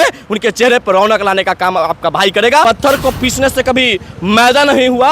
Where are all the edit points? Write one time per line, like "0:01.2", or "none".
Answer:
0:02.6